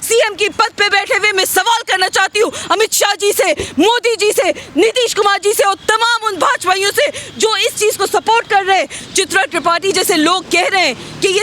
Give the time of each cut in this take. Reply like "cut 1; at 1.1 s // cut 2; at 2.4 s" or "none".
cut 1; at 9.0 s